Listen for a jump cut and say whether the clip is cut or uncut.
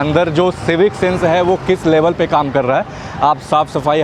uncut